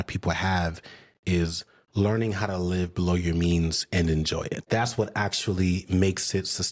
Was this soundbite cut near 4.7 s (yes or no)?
yes